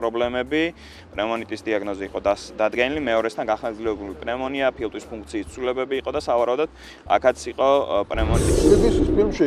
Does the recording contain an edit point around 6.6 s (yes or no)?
no